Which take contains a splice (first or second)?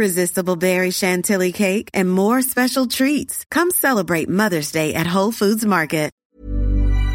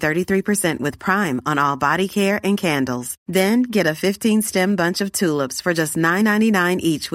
first